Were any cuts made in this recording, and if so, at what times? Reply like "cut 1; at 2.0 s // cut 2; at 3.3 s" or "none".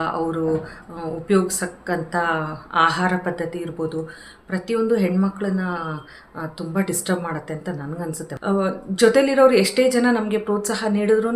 cut 1; at 8.3 s